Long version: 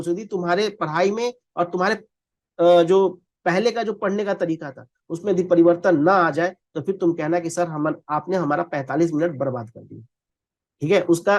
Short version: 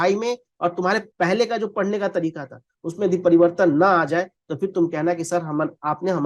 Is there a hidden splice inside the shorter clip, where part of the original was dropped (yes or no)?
yes